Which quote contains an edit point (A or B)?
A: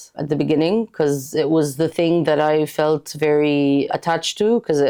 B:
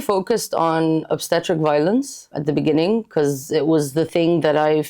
B